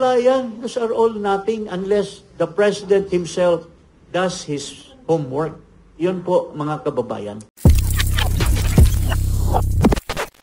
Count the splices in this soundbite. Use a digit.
1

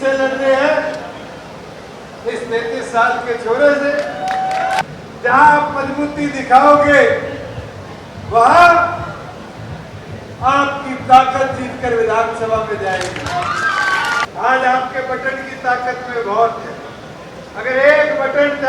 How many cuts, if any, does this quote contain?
2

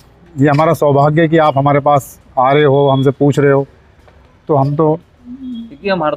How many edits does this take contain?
0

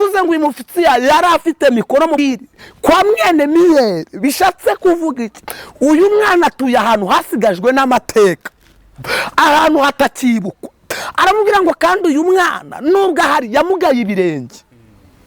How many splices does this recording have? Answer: 1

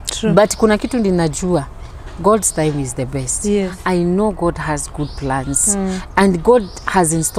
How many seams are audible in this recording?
1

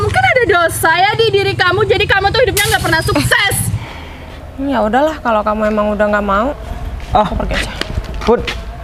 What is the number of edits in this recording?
1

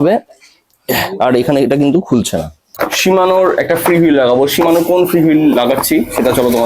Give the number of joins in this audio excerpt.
1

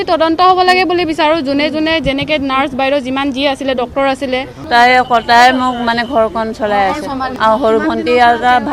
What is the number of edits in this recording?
2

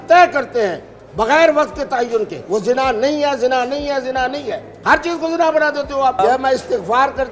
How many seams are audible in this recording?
2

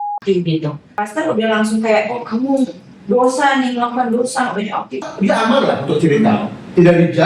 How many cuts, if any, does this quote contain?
2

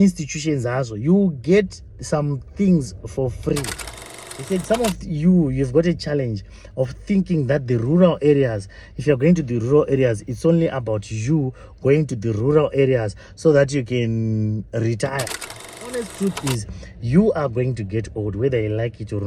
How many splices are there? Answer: 2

